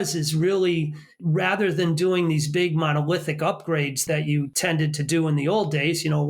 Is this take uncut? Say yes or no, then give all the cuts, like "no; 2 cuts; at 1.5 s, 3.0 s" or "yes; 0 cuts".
no; 2 cuts; at 1.1 s, 4.4 s